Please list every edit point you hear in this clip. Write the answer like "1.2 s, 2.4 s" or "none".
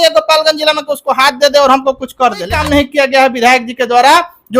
2.5 s